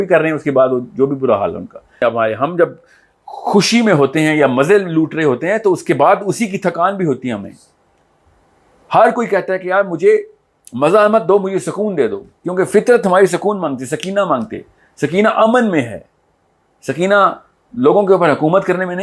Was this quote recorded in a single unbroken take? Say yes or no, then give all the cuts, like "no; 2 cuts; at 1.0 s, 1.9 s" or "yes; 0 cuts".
no; 1 cut; at 2.0 s